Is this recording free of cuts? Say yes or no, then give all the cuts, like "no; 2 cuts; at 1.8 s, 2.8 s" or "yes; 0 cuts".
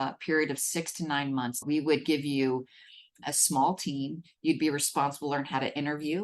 no; 2 cuts; at 1.6 s, 3.2 s